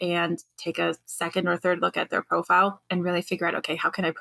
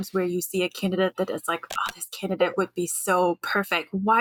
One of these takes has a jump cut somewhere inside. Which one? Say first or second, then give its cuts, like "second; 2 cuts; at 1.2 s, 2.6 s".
first; 2 cuts; at 1.1 s, 2.8 s